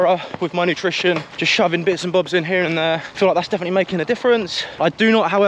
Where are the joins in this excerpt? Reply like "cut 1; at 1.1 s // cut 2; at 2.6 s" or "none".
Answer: none